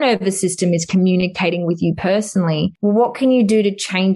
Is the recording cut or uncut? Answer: cut